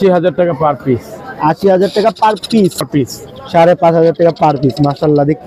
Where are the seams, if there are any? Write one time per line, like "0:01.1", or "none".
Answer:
0:02.9